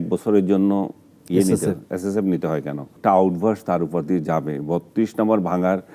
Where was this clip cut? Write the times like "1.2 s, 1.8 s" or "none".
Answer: 2.9 s